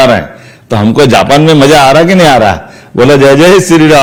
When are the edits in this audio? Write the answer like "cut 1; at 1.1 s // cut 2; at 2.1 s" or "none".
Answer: none